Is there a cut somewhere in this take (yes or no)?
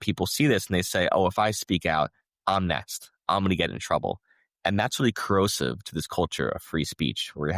no